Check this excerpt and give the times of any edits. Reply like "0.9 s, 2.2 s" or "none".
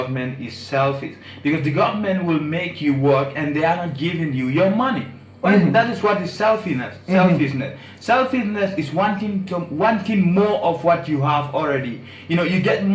none